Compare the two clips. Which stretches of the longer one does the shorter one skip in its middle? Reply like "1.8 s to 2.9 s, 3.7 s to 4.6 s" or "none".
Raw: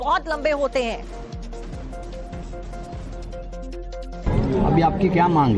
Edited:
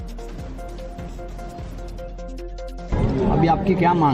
none